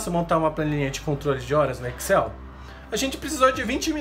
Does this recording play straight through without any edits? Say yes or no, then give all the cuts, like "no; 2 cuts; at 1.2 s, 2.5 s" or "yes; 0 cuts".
yes; 0 cuts